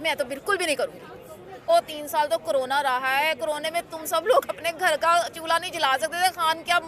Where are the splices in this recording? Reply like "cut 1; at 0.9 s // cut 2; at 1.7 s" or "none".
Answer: cut 1; at 1.7 s